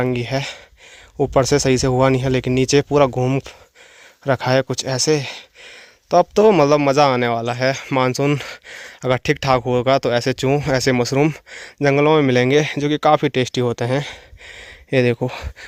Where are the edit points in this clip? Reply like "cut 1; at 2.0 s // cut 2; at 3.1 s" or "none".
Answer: none